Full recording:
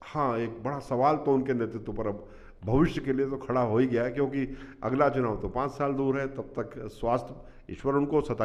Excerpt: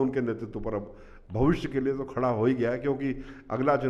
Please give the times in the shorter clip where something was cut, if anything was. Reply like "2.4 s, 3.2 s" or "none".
none